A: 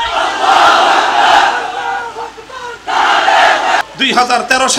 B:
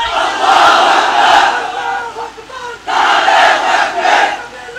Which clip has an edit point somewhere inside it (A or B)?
A